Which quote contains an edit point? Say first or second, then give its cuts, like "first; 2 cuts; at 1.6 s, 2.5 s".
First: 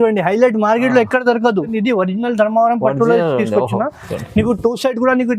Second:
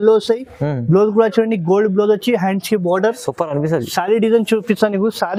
first; 1 cut; at 1.7 s